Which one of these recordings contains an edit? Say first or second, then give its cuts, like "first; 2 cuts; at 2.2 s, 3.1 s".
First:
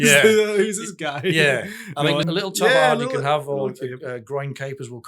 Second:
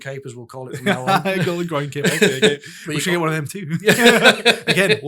first; 1 cut; at 2.3 s